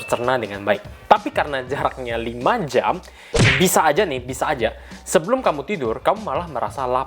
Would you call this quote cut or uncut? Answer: cut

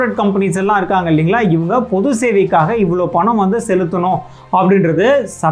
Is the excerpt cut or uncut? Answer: uncut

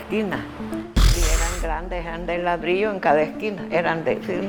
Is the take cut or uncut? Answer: uncut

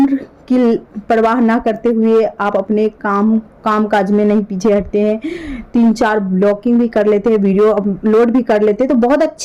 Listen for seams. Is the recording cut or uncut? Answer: uncut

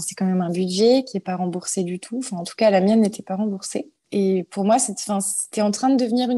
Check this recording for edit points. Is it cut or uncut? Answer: cut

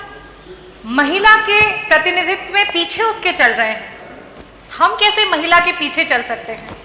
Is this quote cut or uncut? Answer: uncut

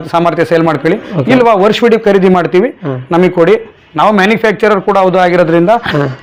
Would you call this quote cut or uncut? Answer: uncut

